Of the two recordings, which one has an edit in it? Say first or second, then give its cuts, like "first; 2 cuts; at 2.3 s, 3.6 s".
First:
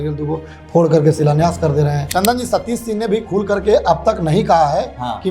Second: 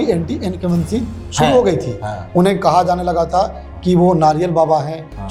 first; 1 cut; at 2.0 s